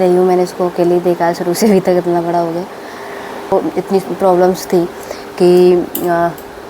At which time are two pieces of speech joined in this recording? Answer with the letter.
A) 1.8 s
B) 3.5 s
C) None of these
B